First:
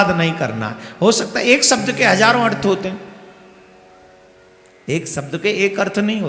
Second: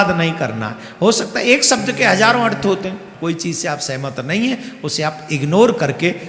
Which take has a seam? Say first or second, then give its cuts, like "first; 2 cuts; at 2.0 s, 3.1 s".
second; 1 cut; at 3.1 s